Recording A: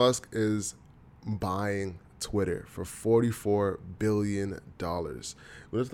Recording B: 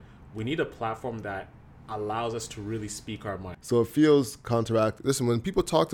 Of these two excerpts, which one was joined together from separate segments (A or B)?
B